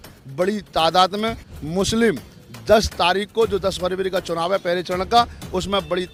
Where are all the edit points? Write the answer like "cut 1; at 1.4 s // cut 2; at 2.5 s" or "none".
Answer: none